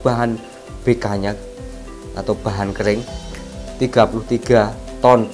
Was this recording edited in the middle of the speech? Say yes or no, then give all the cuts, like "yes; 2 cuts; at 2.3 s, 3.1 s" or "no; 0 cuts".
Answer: yes; 1 cut; at 3.6 s